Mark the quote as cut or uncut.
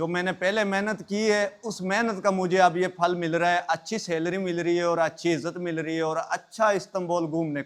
uncut